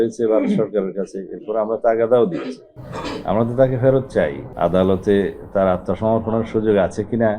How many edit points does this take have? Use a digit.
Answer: 1